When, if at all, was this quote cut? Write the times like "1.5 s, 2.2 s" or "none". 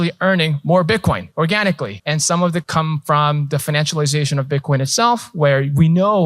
1.3 s, 2.0 s, 2.7 s

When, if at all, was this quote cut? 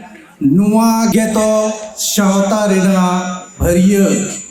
1.1 s

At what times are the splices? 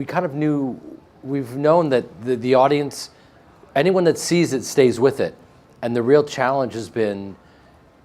2.9 s

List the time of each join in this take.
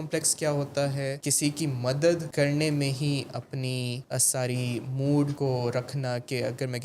1.2 s, 2.3 s, 4.0 s, 5.3 s

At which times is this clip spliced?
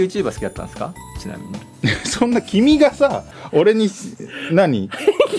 none

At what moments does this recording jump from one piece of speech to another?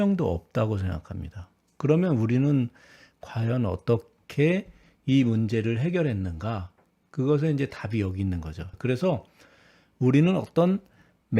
8.6 s

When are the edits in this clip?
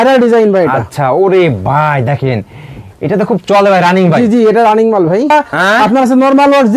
5.3 s

